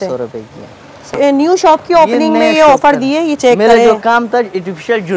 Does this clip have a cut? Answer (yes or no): yes